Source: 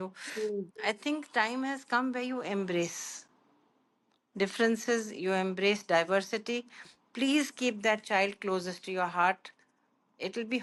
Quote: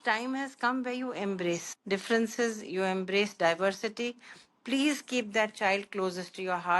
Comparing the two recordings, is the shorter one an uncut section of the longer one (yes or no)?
no